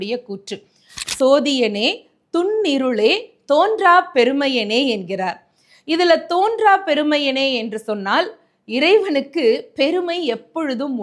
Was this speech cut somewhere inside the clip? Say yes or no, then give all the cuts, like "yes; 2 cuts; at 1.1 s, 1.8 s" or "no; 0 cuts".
yes; 1 cut; at 1.0 s